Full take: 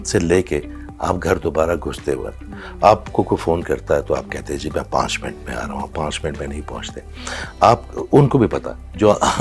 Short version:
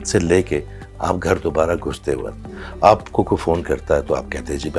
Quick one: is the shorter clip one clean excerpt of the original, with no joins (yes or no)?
yes